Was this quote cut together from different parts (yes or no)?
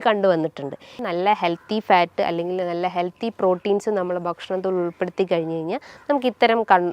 yes